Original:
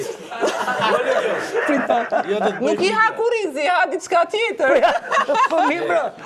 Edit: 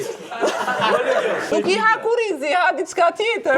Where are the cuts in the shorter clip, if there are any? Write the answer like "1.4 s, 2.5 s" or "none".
1.5 s